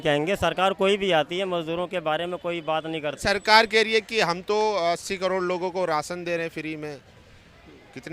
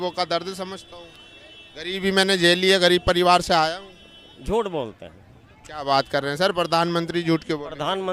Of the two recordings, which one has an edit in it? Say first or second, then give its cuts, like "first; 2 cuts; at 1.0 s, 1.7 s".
first; 1 cut; at 3.2 s